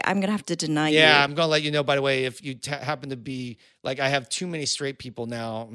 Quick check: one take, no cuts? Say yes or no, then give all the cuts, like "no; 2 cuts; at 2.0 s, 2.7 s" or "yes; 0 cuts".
yes; 0 cuts